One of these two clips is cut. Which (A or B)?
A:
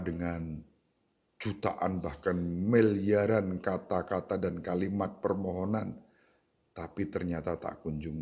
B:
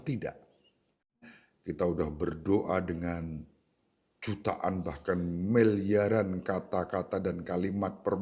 B